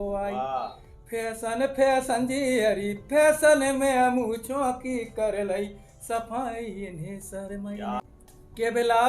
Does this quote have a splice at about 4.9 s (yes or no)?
no